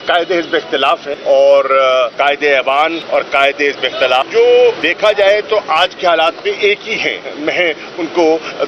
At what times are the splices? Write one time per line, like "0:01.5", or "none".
0:01.1
0:02.1
0:03.0
0:04.2
0:04.9
0:07.2